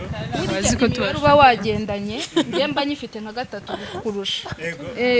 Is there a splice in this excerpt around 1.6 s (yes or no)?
no